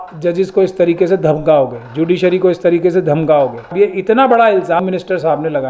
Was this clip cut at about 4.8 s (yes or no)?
yes